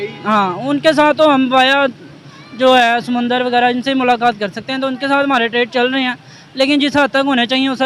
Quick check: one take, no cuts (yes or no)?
yes